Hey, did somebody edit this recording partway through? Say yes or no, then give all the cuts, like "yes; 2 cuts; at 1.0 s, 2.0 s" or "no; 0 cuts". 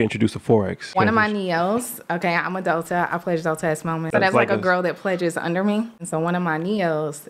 yes; 3 cuts; at 0.9 s, 4.1 s, 6.0 s